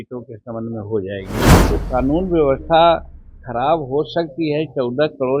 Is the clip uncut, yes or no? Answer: no